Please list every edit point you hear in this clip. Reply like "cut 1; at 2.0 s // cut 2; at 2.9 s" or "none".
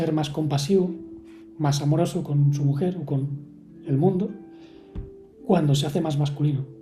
none